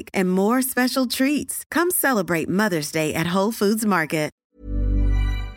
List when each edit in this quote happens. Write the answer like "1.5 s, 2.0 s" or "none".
4.4 s